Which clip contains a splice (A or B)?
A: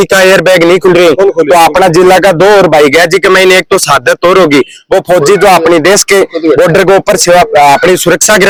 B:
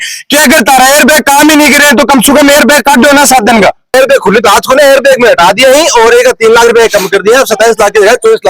B